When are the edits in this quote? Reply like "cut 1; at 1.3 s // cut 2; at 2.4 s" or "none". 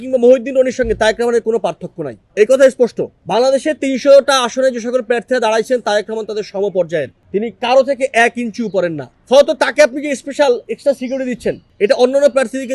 none